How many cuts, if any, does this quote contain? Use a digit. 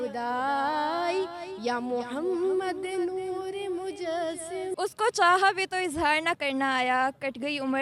1